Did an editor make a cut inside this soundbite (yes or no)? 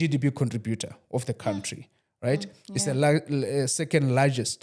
no